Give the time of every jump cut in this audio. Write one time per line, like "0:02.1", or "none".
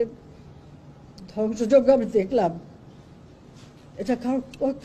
none